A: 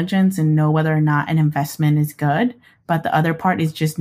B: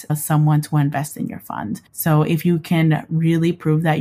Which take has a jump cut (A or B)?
B